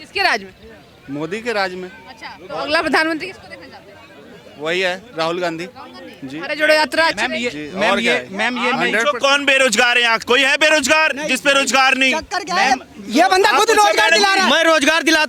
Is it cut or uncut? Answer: uncut